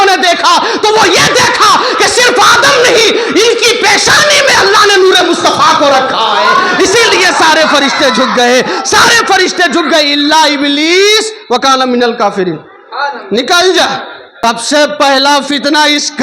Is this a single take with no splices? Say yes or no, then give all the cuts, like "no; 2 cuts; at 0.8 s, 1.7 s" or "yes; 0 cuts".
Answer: no; 1 cut; at 14.2 s